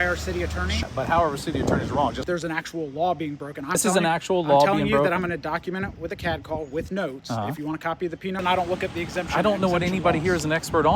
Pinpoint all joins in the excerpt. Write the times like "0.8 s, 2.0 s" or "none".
0.8 s, 2.2 s, 3.8 s, 8.4 s